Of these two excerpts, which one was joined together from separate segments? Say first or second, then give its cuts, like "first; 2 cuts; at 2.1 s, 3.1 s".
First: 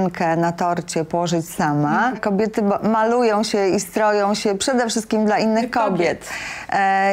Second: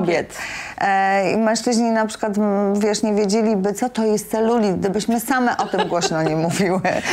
first; 1 cut; at 2.2 s